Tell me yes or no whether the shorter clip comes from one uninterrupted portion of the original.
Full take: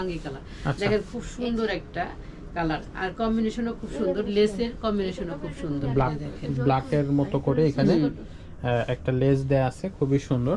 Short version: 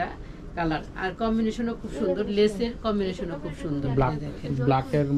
yes